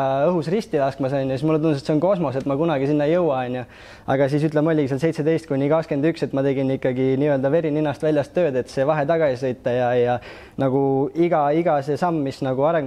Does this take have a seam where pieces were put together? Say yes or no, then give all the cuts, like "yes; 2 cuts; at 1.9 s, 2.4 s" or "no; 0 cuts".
no; 0 cuts